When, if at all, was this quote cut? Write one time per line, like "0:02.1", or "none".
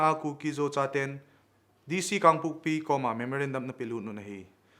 none